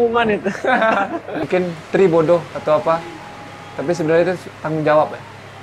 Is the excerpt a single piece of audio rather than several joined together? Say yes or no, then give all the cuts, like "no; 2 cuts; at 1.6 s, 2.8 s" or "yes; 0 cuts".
no; 1 cut; at 1.4 s